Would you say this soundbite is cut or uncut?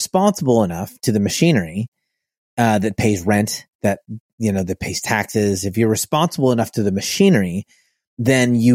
uncut